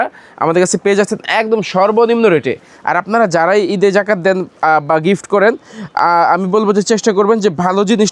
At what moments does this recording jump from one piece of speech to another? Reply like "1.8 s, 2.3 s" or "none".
none